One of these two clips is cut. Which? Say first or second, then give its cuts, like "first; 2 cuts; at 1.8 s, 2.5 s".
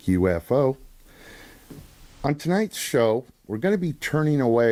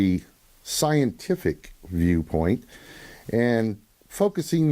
second; 1 cut; at 3.1 s